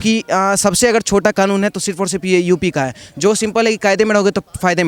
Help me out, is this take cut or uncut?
uncut